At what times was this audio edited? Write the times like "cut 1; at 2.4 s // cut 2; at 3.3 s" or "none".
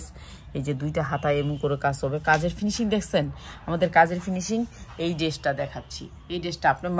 none